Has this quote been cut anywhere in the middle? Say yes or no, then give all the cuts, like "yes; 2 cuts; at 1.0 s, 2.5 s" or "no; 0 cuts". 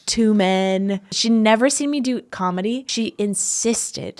yes; 2 cuts; at 1.1 s, 2.9 s